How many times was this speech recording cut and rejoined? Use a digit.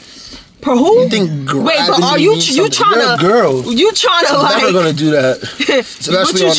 0